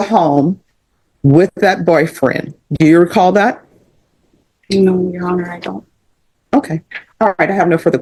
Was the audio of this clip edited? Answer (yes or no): no